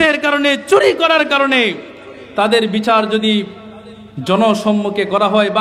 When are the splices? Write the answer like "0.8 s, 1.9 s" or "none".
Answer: none